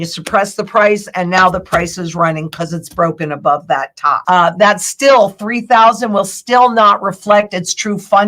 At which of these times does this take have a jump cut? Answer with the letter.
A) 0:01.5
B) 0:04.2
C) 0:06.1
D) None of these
B